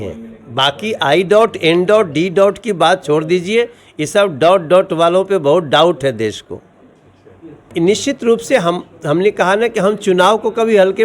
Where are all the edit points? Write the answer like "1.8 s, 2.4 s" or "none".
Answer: 7.5 s

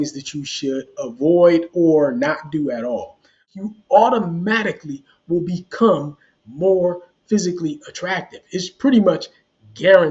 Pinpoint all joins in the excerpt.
3.5 s

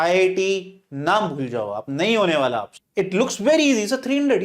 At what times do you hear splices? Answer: 2.8 s

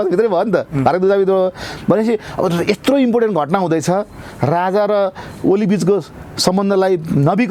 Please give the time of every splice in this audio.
none

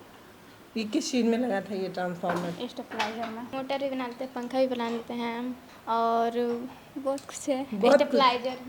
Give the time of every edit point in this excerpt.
3.5 s, 5.7 s

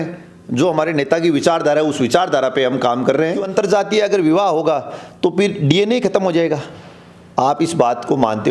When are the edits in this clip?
3.4 s

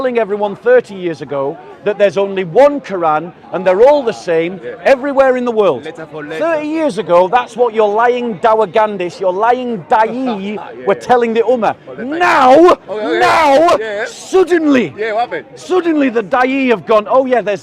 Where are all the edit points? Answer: none

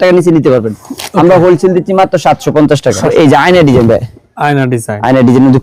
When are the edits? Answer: 3.1 s

